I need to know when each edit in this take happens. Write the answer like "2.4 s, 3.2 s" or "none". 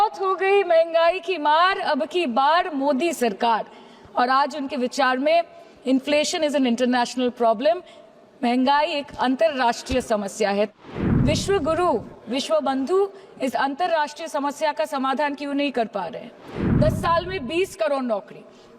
10.8 s, 16.6 s